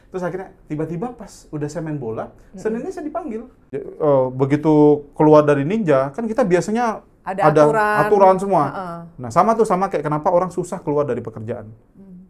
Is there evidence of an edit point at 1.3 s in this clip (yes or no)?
no